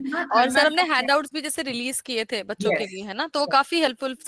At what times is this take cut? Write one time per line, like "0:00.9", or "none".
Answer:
none